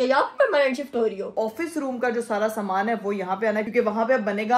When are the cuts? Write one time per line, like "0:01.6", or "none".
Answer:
0:01.3
0:03.7